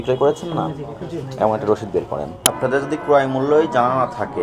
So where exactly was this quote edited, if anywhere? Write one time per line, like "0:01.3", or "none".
0:02.3